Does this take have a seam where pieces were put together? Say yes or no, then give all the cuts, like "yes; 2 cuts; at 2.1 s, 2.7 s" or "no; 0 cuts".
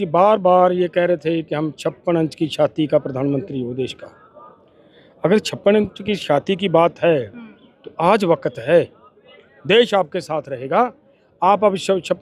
no; 0 cuts